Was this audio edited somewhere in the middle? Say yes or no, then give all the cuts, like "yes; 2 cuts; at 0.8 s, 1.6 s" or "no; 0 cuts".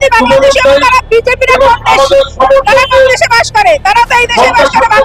no; 0 cuts